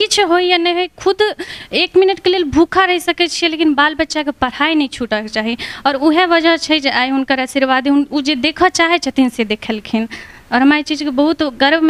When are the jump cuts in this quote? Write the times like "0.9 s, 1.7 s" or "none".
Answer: none